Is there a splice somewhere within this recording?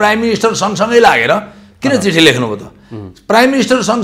no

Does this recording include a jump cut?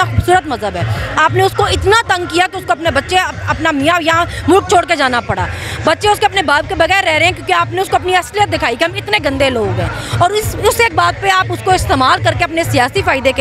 no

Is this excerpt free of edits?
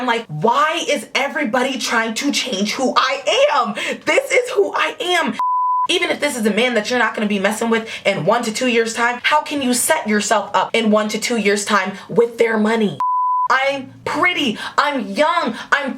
no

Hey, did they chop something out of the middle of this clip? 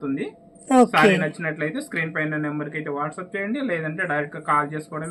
no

